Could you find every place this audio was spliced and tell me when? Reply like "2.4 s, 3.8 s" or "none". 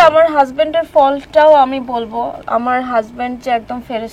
none